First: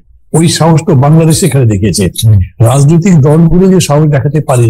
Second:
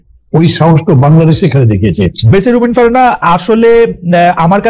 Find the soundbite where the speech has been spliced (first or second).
second